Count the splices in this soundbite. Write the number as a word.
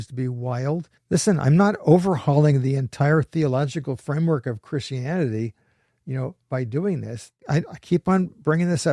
two